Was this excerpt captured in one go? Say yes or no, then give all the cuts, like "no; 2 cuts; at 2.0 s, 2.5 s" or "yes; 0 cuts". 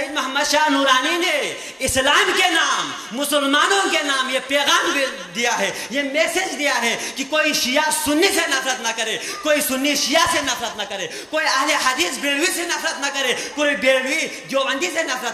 yes; 0 cuts